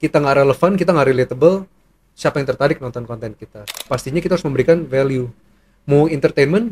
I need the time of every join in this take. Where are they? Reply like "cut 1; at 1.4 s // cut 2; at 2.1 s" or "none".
cut 1; at 3.8 s